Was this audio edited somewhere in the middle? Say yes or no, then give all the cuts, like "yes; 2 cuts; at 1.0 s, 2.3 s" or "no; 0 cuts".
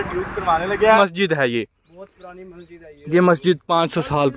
yes; 1 cut; at 1.0 s